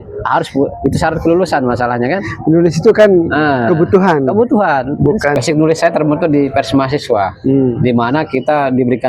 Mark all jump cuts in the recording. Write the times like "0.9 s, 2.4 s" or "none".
5.4 s